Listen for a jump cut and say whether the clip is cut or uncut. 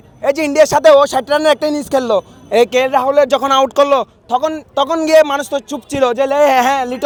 uncut